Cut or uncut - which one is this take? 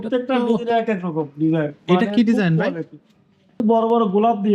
cut